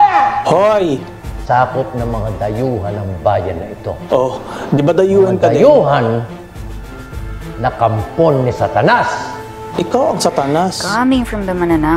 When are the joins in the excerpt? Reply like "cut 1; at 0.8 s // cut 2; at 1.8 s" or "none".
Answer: cut 1; at 1.4 s